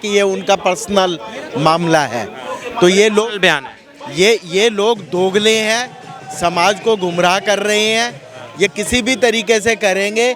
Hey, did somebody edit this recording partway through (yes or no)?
no